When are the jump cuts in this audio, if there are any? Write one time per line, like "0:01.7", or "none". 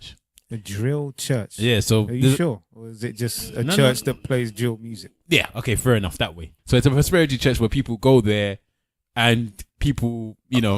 0:06.5